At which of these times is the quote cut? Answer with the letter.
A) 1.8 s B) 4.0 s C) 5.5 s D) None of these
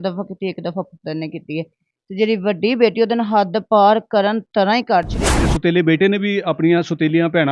C